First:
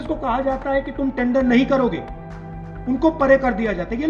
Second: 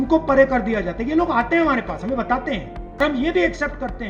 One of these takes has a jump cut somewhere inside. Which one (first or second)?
second